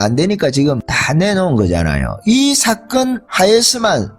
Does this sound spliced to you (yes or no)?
yes